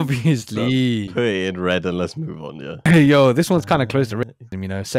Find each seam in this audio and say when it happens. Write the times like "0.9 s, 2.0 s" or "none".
2.7 s